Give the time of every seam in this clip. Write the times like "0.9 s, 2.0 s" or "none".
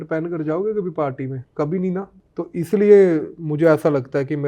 1.4 s, 2.2 s